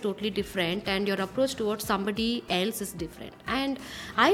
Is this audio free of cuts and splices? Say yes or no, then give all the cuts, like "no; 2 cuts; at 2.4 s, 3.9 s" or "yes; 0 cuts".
yes; 0 cuts